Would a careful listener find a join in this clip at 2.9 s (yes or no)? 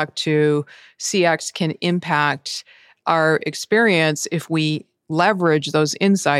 no